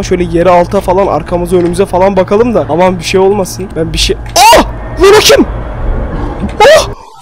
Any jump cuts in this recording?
yes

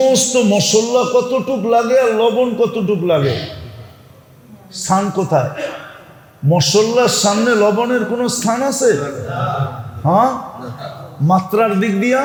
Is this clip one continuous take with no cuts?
yes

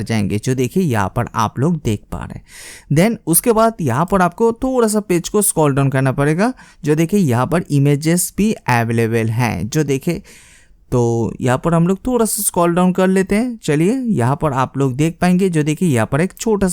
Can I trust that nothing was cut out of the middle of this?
yes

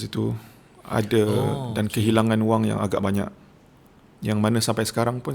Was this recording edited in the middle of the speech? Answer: no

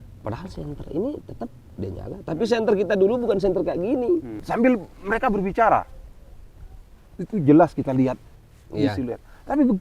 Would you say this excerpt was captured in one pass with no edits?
no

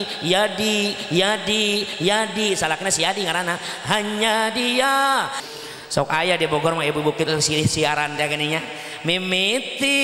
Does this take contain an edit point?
yes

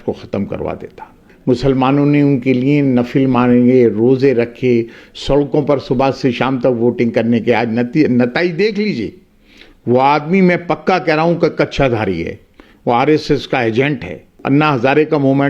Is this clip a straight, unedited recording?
no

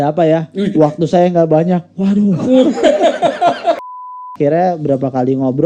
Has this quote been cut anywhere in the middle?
yes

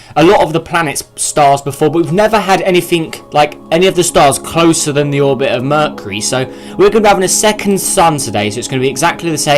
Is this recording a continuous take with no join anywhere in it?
no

